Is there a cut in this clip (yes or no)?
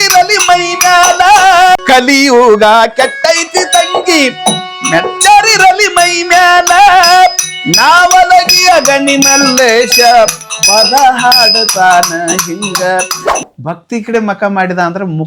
yes